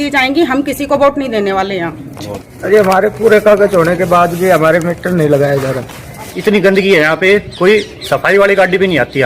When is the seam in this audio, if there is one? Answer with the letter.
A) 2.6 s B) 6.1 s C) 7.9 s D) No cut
B